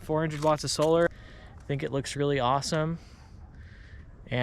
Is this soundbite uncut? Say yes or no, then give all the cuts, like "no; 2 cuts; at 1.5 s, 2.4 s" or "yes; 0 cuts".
no; 1 cut; at 1.1 s